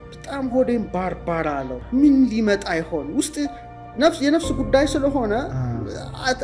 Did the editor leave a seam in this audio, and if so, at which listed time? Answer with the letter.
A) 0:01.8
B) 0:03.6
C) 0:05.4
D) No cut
A